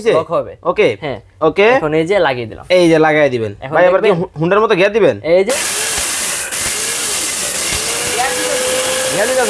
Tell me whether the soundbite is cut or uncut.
uncut